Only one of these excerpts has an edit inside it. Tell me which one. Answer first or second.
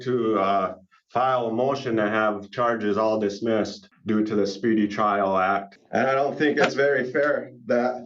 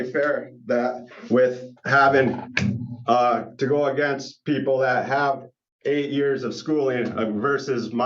first